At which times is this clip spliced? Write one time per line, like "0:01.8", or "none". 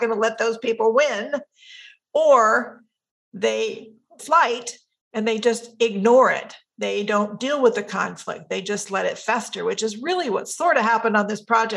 0:04.2